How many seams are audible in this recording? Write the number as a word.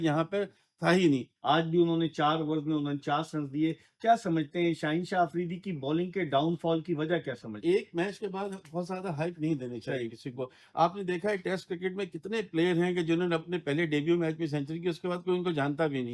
two